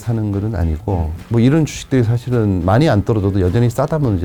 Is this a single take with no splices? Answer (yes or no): yes